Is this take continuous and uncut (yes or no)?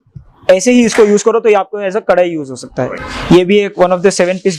no